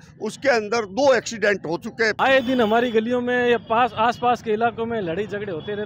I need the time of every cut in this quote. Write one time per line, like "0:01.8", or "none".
0:02.1